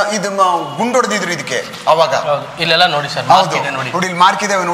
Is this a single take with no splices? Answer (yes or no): yes